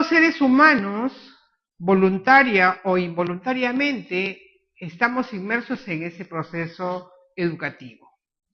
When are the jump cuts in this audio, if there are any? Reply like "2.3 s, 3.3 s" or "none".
6.4 s